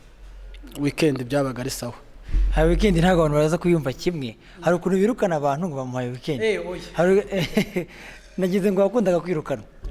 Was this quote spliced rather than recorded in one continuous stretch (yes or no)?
no